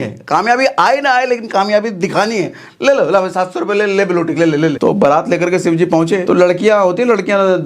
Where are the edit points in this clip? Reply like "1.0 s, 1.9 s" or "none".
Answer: 4.8 s, 6.2 s